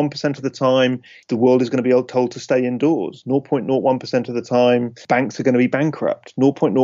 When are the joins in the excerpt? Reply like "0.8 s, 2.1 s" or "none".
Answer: 1.1 s, 5.0 s